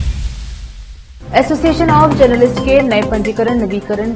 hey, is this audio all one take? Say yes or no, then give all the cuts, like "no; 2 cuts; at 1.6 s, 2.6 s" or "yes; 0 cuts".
no; 1 cut; at 1.1 s